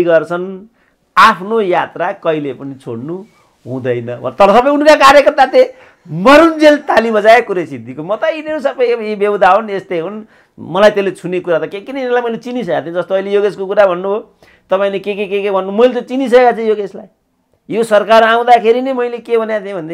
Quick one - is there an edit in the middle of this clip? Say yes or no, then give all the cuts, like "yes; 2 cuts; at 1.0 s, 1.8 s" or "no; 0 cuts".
no; 0 cuts